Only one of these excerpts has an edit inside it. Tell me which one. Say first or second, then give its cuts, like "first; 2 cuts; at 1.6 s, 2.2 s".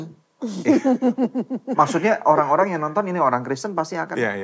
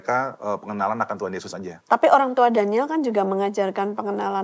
second; 1 cut; at 1.7 s